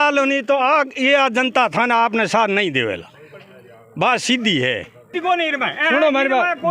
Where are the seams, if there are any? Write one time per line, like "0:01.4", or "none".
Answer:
0:05.2